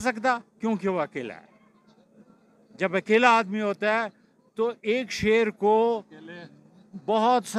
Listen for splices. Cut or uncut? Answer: uncut